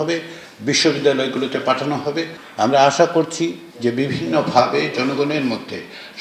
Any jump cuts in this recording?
yes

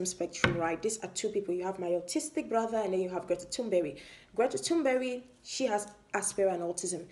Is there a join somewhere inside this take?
no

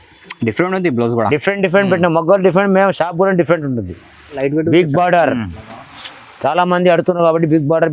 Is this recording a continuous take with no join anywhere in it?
no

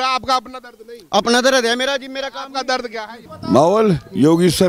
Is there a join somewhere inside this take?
yes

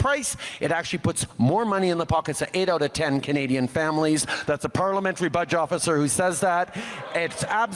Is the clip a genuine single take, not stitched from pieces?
yes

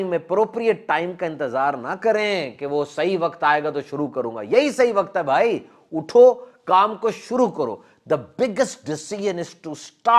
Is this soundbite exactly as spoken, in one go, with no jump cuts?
yes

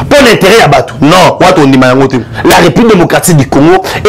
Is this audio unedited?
no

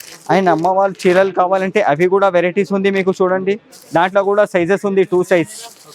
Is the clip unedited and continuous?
yes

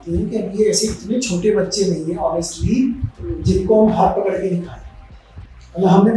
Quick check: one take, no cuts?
yes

